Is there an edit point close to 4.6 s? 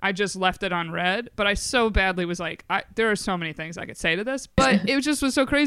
yes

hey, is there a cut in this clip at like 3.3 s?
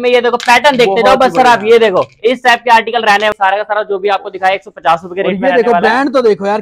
yes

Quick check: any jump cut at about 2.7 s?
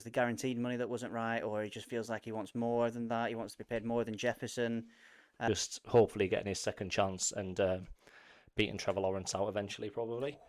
no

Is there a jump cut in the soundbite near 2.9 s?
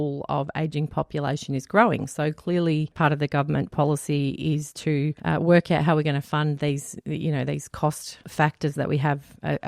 yes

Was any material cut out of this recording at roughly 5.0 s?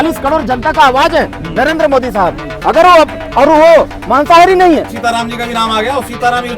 yes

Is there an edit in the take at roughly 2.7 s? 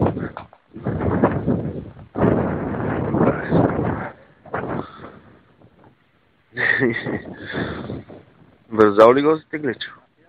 yes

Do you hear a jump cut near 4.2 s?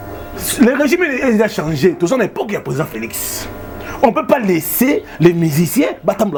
no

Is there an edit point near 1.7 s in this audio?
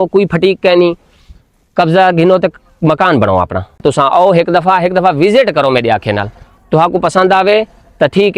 no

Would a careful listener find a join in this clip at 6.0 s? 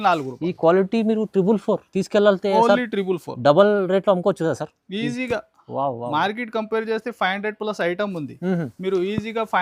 no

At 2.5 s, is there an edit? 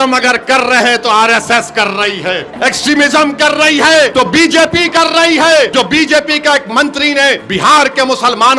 yes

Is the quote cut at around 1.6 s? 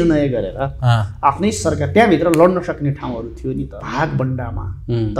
no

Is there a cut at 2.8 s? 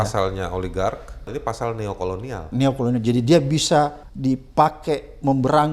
no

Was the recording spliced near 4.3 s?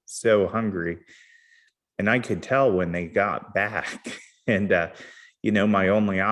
no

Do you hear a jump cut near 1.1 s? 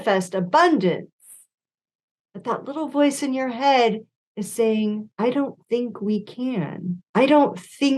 no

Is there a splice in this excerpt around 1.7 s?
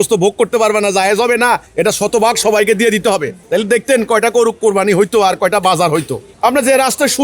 yes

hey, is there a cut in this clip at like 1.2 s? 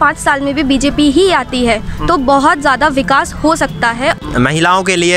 no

